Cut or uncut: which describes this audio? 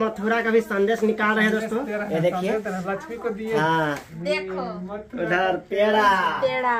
cut